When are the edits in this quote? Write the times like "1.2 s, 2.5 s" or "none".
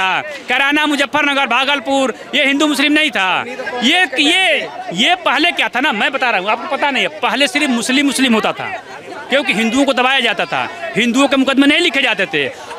none

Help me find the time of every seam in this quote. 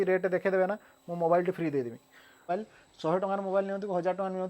2.5 s

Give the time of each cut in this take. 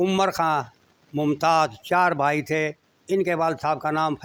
none

